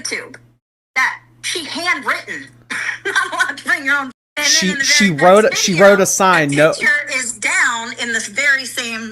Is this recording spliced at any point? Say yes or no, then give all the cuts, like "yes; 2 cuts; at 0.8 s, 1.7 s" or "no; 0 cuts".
yes; 1 cut; at 4.2 s